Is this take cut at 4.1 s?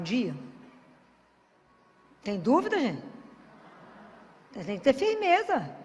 no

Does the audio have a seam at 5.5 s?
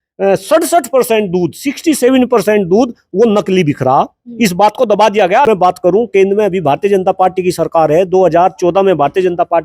yes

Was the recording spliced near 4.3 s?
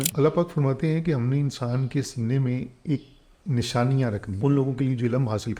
yes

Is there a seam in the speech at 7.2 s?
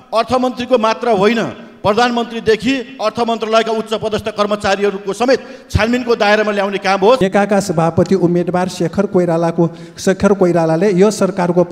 yes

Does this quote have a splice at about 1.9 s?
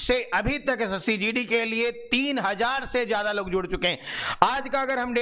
no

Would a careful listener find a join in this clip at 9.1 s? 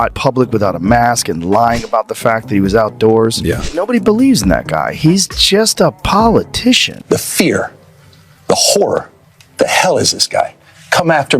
no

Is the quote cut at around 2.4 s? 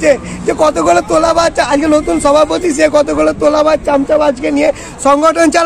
no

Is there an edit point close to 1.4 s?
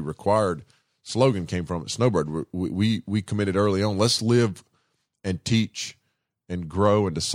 no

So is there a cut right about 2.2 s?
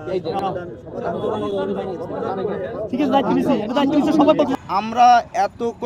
no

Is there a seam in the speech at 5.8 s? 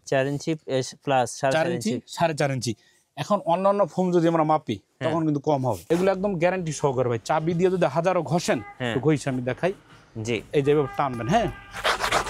yes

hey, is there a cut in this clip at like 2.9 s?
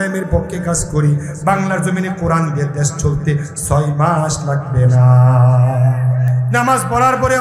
no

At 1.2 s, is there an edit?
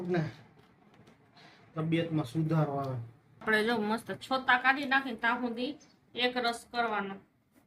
no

